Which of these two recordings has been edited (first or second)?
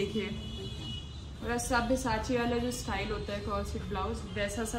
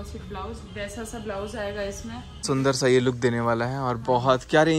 second